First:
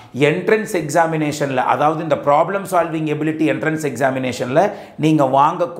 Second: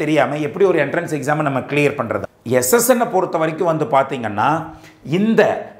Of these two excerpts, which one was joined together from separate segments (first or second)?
second